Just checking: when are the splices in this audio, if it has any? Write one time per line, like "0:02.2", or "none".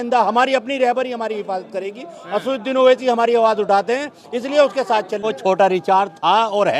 0:05.2